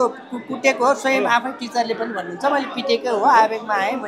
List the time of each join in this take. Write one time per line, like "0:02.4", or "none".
none